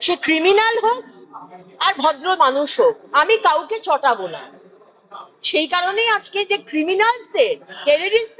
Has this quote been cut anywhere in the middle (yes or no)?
no